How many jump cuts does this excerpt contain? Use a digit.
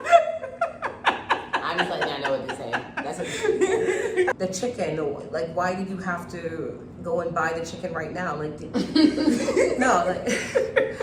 1